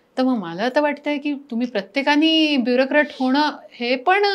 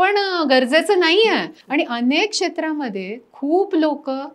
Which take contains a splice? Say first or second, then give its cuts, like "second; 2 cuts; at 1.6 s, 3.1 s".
second; 1 cut; at 1.6 s